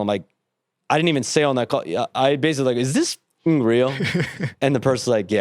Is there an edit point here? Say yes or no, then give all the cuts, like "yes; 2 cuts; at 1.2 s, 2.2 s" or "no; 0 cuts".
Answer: no; 0 cuts